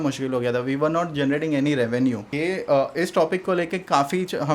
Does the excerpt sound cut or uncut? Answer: cut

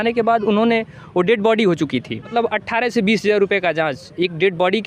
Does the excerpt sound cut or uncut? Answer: cut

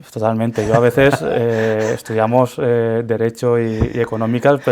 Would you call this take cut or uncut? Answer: uncut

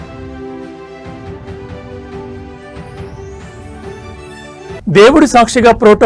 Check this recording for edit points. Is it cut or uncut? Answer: uncut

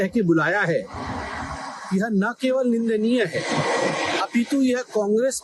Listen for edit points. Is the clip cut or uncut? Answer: uncut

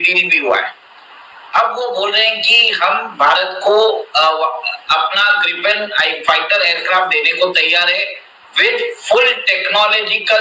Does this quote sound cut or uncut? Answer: uncut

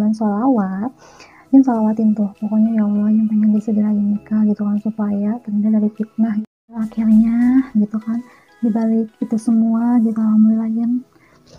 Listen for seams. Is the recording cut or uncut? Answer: cut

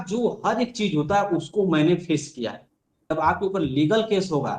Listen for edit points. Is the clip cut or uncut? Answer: cut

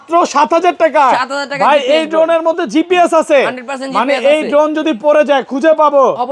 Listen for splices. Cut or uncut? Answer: uncut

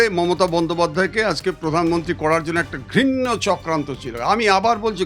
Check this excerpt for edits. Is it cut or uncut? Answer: uncut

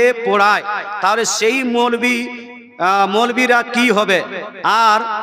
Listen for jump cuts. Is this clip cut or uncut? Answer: uncut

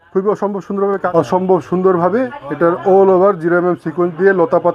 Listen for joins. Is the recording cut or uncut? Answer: cut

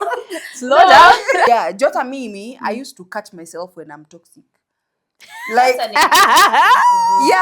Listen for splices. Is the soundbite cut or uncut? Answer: cut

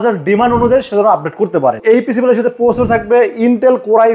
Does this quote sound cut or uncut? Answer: cut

